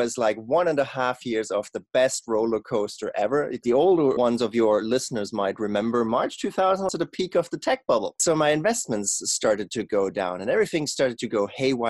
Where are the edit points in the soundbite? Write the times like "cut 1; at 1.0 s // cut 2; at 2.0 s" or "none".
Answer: cut 1; at 3.6 s // cut 2; at 6.9 s